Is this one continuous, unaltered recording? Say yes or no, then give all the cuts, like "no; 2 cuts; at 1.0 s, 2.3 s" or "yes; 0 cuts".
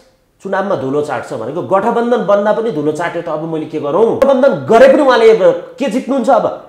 no; 1 cut; at 4.2 s